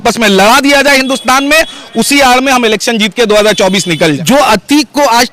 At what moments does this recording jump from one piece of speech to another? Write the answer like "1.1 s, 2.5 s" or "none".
4.2 s